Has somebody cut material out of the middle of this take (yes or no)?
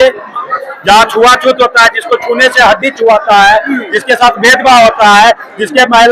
no